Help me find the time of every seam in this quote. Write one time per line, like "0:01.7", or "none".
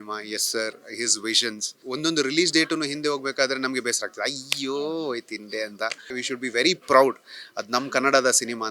0:01.8
0:06.1